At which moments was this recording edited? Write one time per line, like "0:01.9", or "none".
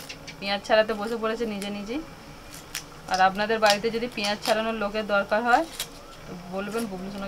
none

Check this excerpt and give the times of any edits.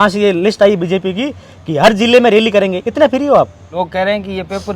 0:03.6

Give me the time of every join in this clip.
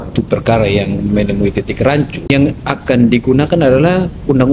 0:02.3

